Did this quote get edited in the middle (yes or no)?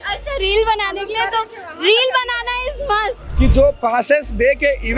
yes